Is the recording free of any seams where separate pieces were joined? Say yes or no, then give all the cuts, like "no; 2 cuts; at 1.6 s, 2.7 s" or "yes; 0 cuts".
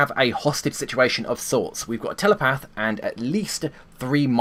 yes; 0 cuts